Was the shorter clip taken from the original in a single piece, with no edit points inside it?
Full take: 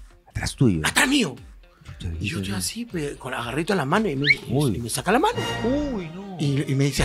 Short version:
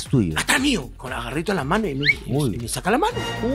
no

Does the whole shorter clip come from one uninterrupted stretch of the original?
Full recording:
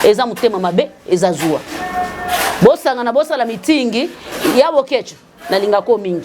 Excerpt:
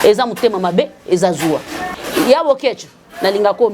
no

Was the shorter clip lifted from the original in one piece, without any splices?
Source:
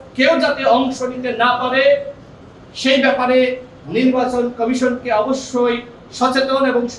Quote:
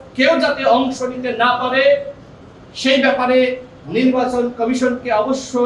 yes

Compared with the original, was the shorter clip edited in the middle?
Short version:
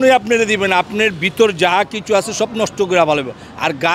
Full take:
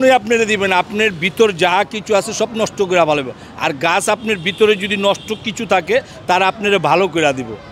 no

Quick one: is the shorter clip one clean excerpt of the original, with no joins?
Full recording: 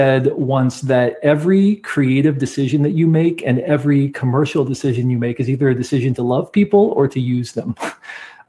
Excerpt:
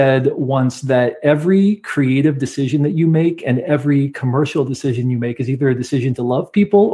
yes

